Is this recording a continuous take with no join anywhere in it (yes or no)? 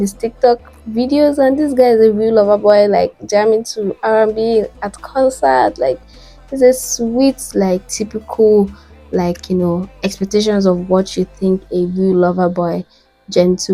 yes